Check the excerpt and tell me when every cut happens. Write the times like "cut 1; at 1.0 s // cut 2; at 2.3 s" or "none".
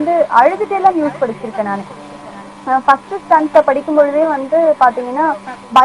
none